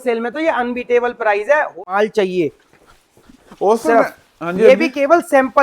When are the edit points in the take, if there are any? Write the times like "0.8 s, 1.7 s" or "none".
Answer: 1.9 s